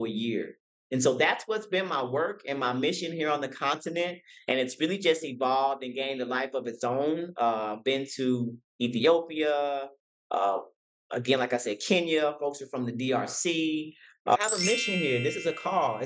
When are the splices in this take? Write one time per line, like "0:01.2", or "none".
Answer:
0:14.4